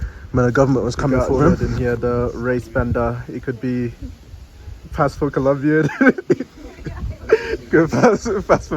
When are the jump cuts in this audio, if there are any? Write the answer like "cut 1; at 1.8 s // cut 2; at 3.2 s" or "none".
cut 1; at 1.6 s